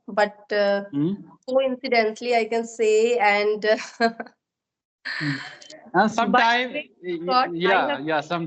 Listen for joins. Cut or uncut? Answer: uncut